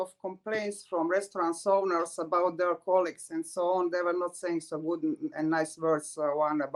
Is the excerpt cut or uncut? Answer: uncut